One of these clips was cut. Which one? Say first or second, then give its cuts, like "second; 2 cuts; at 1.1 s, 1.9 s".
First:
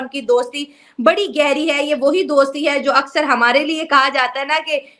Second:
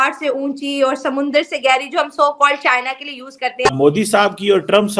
second; 1 cut; at 3.7 s